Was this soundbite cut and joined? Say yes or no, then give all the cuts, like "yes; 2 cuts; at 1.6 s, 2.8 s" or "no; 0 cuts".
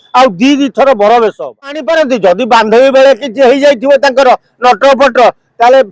yes; 1 cut; at 1.8 s